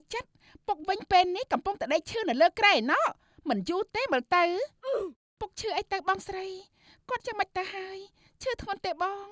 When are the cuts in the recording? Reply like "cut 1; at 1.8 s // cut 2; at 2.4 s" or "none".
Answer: none